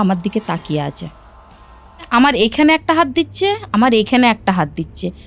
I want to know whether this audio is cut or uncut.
cut